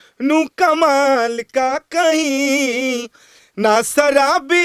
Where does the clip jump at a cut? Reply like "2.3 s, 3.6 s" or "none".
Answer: none

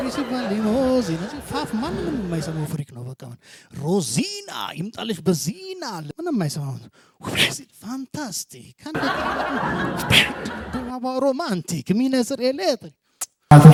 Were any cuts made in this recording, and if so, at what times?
none

